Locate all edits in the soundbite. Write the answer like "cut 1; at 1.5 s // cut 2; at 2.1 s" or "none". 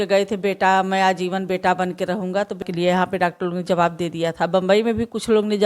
cut 1; at 2.6 s